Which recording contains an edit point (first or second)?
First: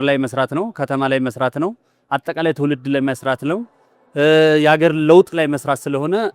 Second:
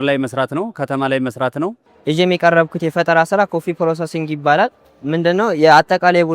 second